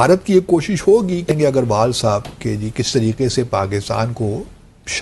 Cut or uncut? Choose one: cut